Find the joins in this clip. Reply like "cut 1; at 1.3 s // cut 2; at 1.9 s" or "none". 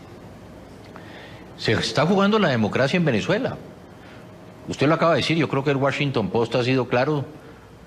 none